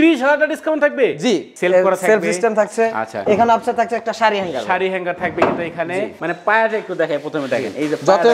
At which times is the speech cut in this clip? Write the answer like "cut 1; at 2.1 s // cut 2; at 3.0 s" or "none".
cut 1; at 1.5 s // cut 2; at 6.1 s